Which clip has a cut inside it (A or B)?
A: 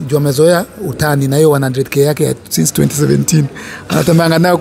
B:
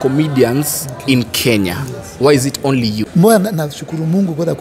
B